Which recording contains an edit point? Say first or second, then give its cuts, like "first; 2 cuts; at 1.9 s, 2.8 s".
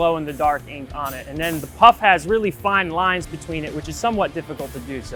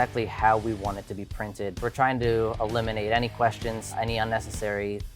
second; 2 cuts; at 1.8 s, 3.8 s